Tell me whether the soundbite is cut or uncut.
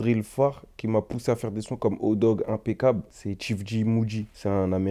uncut